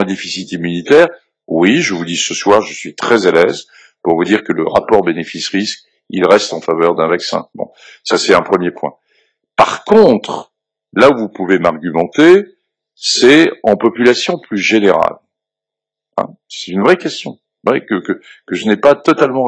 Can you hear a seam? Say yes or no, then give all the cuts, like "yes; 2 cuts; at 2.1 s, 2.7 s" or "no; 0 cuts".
no; 0 cuts